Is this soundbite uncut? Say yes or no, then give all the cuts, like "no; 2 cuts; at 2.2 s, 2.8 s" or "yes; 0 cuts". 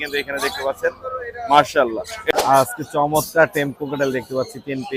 no; 1 cut; at 2.3 s